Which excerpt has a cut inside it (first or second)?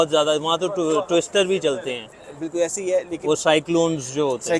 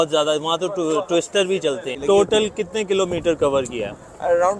second